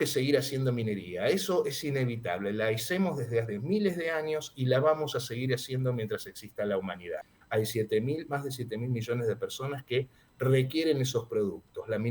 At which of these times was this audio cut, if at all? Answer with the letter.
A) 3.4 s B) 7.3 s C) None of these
B